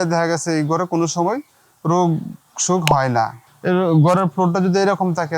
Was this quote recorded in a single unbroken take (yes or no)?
no